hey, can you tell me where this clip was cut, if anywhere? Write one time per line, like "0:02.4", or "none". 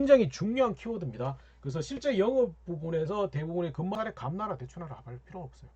0:04.0